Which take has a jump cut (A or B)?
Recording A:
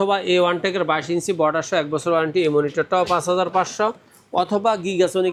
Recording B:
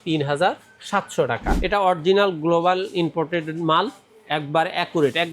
B